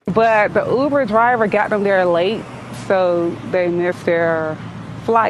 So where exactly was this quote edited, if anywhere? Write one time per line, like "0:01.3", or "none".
none